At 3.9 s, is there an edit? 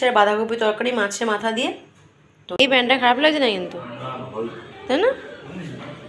no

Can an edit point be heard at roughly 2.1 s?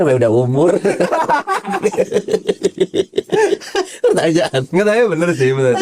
no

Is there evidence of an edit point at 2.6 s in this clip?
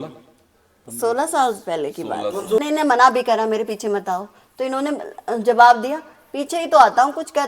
yes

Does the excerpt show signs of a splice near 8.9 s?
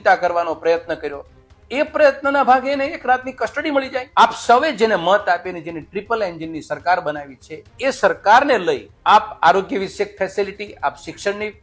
yes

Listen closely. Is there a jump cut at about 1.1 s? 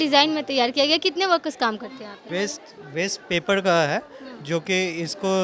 no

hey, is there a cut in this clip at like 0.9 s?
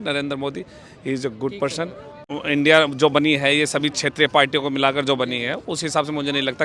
no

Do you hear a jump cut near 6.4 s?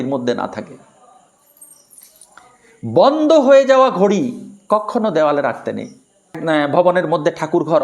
yes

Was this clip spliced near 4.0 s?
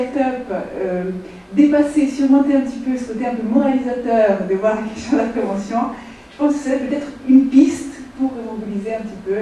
yes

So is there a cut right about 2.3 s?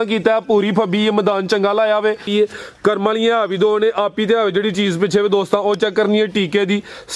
yes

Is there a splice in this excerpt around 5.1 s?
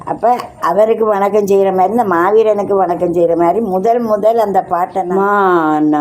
yes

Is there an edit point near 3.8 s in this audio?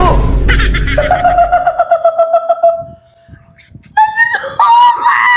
no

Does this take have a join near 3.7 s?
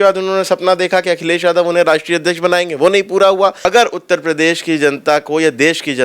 yes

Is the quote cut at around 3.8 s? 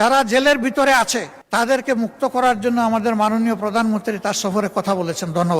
no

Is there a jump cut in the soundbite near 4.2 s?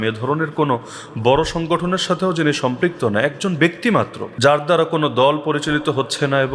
yes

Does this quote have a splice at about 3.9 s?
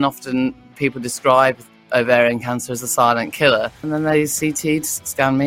yes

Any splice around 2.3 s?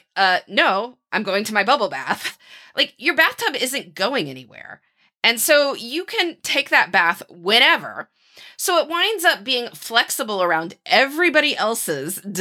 yes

